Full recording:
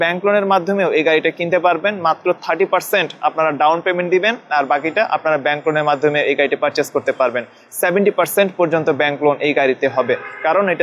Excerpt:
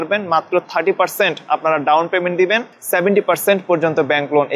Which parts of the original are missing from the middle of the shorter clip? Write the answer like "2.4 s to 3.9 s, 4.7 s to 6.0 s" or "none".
4.4 s to 7.6 s